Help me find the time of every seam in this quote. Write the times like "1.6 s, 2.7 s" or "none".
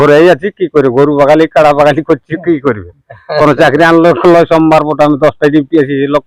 none